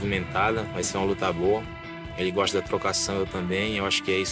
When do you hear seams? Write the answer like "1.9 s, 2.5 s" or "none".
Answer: none